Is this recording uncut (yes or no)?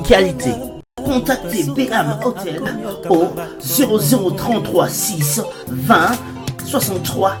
yes